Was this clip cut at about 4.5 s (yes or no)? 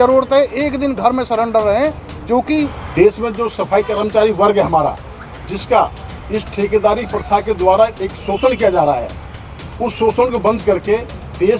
no